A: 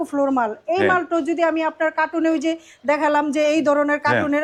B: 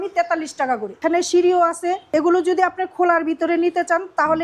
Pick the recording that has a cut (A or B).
B